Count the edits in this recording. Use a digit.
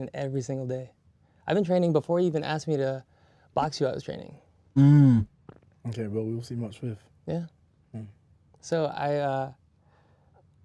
0